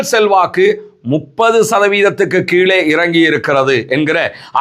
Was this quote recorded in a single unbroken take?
yes; 0 cuts

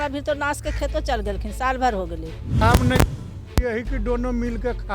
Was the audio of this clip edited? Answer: yes; 1 cut; at 2.6 s

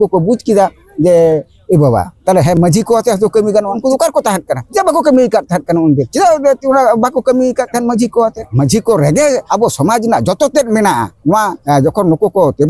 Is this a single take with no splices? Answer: no; 6 cuts; at 3.8 s, 4.6 s, 6.1 s, 8.4 s, 9.4 s, 11.6 s

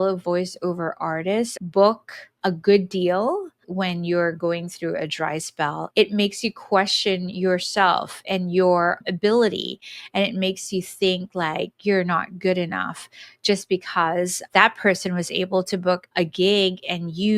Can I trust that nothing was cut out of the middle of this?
no; 4 cuts; at 1.5 s, 3.5 s, 5.8 s, 9.0 s

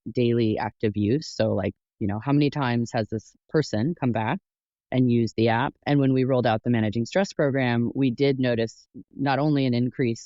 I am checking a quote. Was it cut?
yes; 1 cut; at 5.8 s

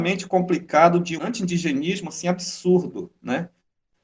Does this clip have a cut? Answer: yes; 1 cut; at 1.1 s

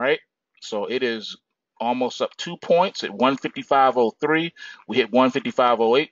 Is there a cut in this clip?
no; 0 cuts

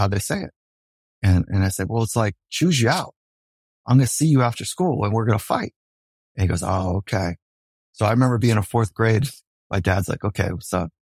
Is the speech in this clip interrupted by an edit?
yes; 1 cut; at 3.7 s

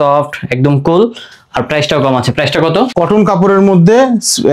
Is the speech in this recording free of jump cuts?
no; 1 cut; at 2.9 s

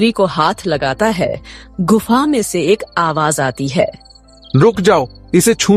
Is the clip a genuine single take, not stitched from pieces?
yes; 0 cuts

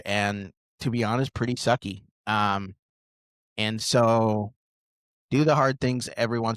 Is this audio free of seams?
yes; 0 cuts

